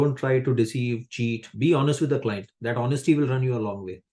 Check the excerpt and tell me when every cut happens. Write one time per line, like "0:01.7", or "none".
none